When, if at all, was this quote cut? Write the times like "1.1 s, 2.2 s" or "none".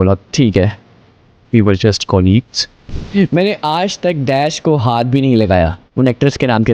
2.8 s, 5.8 s